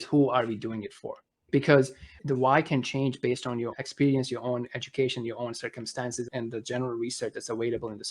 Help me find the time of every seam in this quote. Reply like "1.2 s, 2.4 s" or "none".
1.5 s, 2.1 s, 3.7 s, 6.3 s